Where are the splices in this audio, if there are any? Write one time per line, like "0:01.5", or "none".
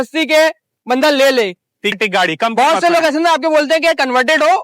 0:01.9

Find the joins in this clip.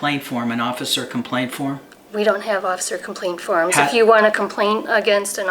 0:03.8

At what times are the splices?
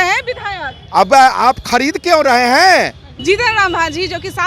0:03.1

